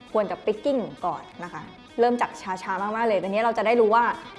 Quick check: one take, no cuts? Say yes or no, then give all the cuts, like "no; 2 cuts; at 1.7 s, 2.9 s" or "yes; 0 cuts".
yes; 0 cuts